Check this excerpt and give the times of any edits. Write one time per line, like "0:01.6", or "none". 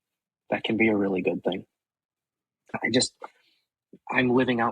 0:02.8